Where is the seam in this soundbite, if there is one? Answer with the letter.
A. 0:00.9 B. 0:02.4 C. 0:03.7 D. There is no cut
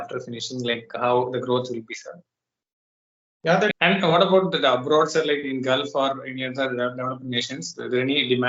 C